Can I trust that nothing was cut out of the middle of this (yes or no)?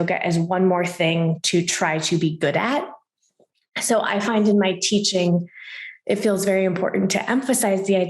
yes